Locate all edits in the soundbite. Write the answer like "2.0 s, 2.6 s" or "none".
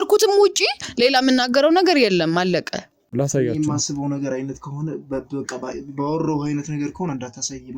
3.1 s